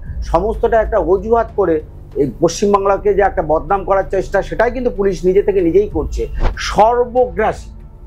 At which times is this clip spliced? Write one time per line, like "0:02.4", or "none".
0:06.3